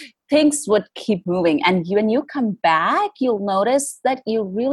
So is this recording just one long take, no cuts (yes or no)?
yes